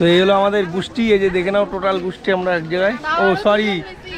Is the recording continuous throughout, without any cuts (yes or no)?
yes